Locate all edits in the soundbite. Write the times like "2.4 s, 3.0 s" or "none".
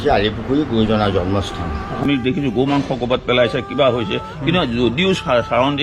2.2 s